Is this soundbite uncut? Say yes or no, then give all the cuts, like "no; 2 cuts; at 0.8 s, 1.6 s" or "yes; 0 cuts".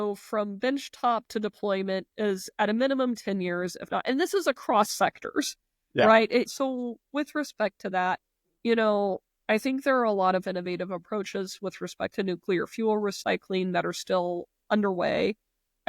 no; 1 cut; at 6.5 s